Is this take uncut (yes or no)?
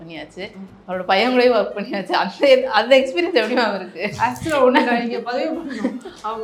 yes